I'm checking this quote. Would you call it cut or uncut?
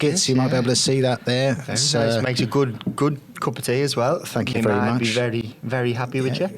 uncut